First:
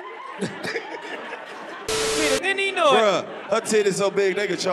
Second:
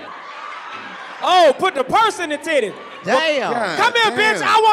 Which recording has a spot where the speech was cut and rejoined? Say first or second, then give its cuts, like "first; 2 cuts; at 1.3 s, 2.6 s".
first; 1 cut; at 2.1 s